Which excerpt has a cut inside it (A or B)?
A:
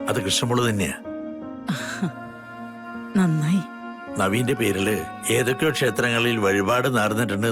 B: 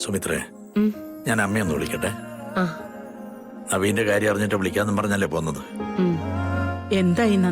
B